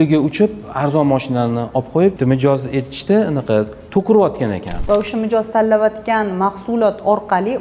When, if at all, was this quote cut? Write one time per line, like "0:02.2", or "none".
0:02.2
0:04.7